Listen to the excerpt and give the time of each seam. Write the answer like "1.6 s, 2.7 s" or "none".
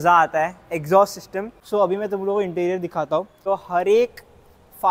1.6 s, 3.4 s